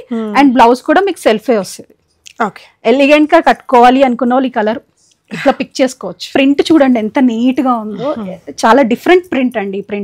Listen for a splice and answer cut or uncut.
cut